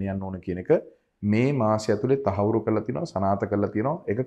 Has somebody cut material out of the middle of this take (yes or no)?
no